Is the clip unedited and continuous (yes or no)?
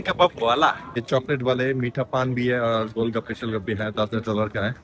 no